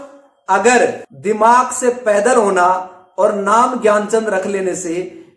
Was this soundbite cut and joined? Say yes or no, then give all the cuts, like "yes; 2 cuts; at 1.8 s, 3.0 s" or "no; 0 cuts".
yes; 1 cut; at 1.1 s